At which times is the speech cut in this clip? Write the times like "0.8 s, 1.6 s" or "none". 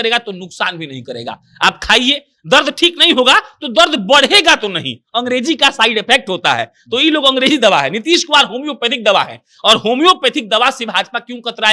none

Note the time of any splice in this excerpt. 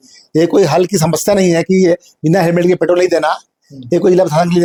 none

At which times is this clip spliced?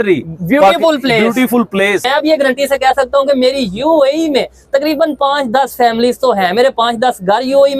2.1 s

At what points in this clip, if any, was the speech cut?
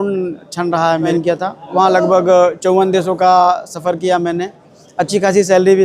1.1 s

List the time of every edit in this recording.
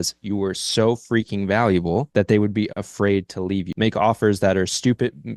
2.1 s, 3.7 s

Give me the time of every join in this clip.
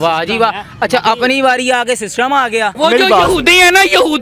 2.7 s

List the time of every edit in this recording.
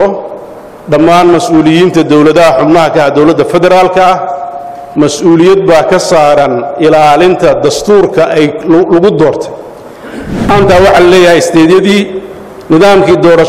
10.5 s

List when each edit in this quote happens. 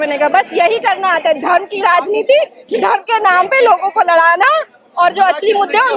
none

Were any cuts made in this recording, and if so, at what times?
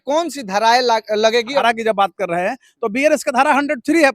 1.6 s

